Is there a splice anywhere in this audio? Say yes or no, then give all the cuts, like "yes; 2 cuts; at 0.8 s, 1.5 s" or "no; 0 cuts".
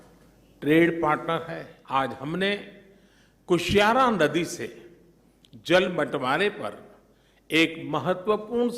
yes; 1 cut; at 1.7 s